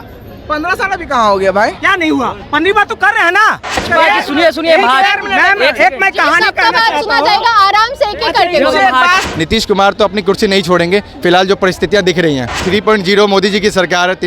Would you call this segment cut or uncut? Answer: cut